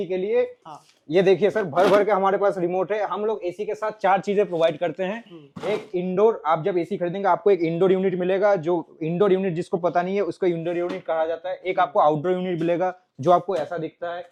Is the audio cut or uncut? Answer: uncut